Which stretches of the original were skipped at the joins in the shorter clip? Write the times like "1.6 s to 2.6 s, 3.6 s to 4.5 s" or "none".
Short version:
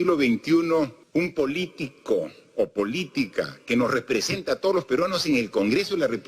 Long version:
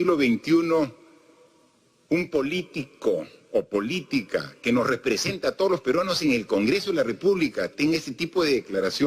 1.0 s to 2.0 s

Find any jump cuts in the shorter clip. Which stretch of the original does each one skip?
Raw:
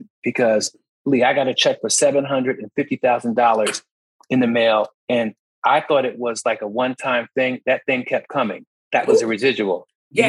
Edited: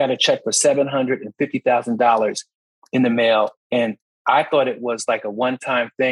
none

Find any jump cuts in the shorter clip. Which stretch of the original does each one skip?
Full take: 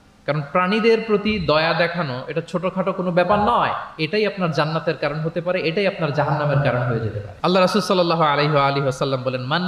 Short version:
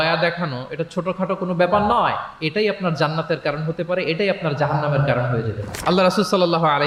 none

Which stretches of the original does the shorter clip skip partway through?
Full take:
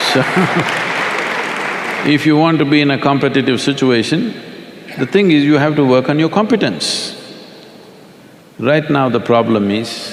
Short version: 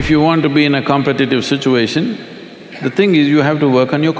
none

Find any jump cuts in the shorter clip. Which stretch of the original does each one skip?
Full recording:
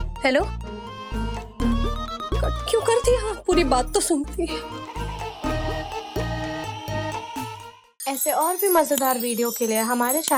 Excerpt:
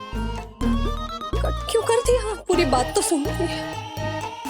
4.5 s to 6.4 s

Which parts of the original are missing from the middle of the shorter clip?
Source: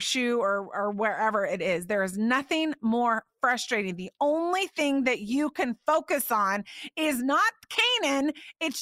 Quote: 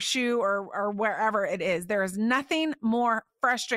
none

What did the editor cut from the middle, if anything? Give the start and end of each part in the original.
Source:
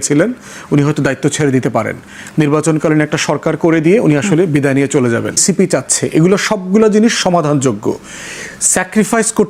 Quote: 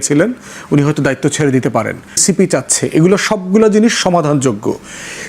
2.1 s to 5.3 s

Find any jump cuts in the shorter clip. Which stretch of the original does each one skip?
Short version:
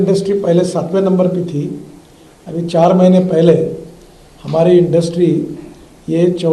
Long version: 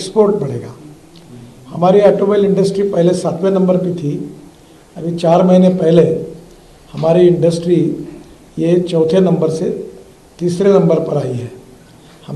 none

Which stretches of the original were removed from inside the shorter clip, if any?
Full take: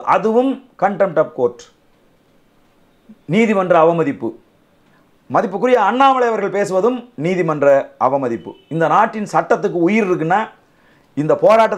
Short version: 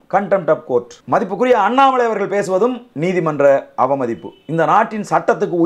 1.6 s to 5.2 s

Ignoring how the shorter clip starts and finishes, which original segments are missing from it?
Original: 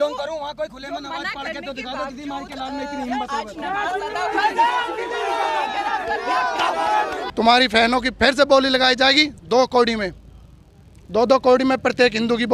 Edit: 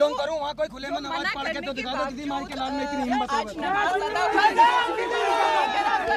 none

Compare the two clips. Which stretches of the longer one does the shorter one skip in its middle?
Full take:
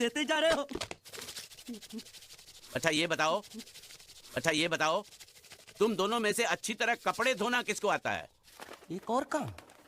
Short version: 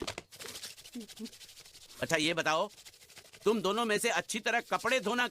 3.5 s to 5.1 s

